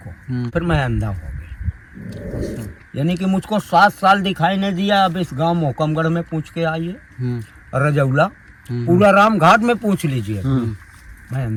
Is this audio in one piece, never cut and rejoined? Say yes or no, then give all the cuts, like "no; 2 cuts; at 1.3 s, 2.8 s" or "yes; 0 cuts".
yes; 0 cuts